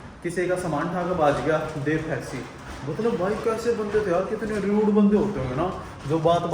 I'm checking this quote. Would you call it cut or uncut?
uncut